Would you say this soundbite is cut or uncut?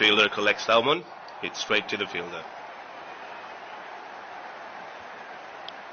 uncut